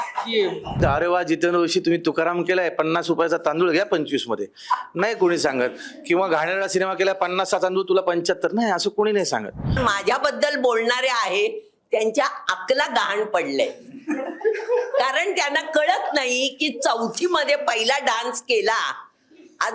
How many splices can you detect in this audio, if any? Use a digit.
2